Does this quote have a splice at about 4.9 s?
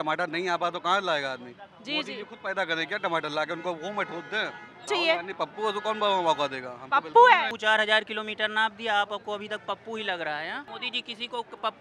yes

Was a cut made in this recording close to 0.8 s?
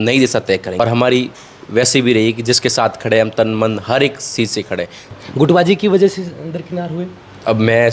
yes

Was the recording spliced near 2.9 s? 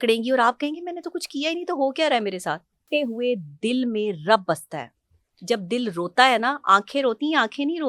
yes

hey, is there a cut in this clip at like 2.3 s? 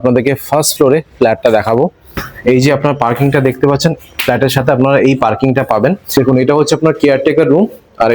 yes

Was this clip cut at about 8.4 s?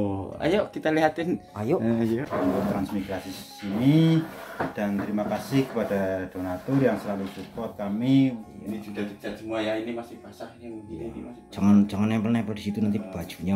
yes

